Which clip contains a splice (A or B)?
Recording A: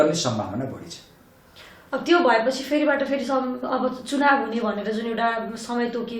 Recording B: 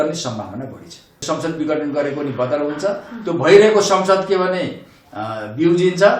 B